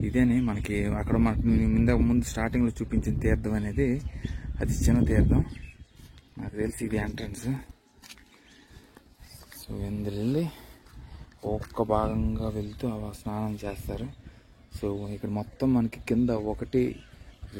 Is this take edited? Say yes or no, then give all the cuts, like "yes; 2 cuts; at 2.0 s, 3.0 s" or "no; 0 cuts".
no; 0 cuts